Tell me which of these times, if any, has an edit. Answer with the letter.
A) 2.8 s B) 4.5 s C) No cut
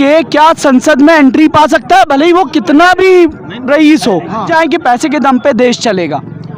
B